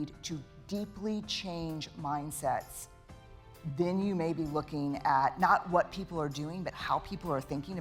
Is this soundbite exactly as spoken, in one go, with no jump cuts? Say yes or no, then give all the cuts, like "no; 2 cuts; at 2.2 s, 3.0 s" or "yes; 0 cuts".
yes; 0 cuts